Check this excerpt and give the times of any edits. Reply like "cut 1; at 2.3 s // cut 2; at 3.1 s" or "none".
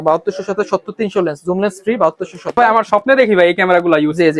cut 1; at 2.6 s